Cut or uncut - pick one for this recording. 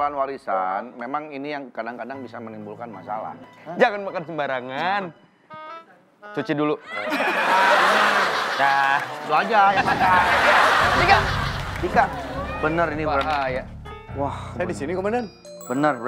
cut